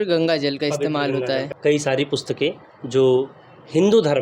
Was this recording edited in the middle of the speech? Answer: yes; 1 cut; at 1.5 s

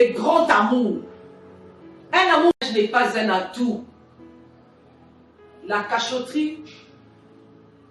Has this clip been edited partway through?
yes; 1 cut; at 2.6 s

